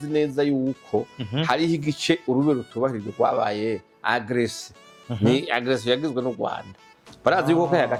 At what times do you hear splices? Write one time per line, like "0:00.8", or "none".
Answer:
none